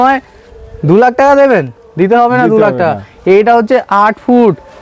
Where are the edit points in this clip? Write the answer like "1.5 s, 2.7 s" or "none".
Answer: none